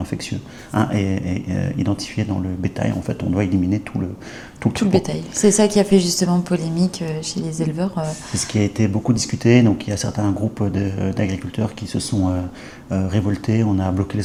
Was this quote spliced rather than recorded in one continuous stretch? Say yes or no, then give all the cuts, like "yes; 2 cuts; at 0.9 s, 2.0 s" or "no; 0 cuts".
no; 0 cuts